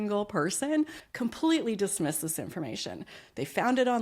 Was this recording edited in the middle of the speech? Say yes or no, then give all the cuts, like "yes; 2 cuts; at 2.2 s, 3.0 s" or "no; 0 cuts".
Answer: yes; 1 cut; at 1.0 s